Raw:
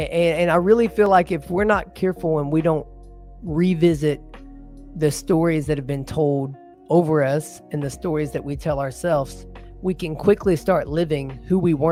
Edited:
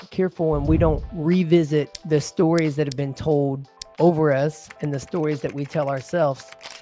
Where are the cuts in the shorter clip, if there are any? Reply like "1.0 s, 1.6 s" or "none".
1.1 s, 2.0 s